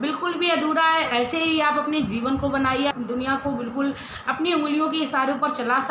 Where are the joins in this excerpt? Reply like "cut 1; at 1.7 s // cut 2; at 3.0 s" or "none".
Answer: cut 1; at 2.9 s